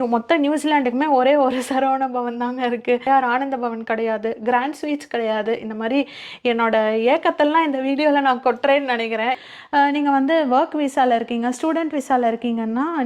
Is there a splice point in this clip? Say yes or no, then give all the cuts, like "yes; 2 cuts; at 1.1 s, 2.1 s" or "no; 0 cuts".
yes; 2 cuts; at 3.1 s, 9.4 s